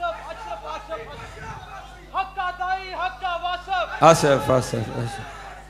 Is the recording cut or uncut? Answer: uncut